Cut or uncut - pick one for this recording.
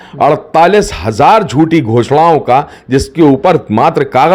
uncut